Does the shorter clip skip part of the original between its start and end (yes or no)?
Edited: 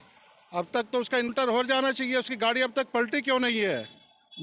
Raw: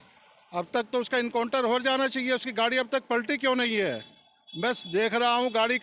yes